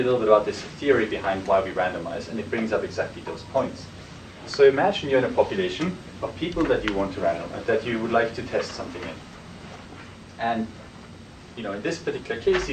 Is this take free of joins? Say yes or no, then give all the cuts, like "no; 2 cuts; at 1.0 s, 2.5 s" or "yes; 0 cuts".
no; 1 cut; at 6.2 s